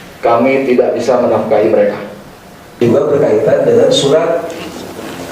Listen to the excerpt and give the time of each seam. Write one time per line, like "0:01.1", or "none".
0:02.7